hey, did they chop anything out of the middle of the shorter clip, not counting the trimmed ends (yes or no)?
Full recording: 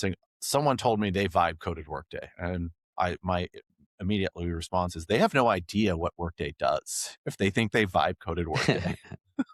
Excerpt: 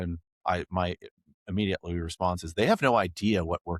no